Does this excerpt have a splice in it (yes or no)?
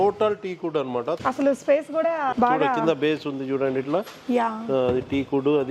yes